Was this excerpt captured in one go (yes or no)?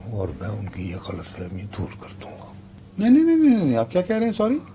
yes